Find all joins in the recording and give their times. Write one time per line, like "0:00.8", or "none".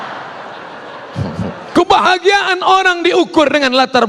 0:01.7